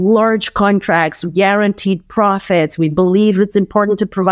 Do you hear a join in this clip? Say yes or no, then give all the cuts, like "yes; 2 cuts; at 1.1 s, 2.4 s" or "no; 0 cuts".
no; 0 cuts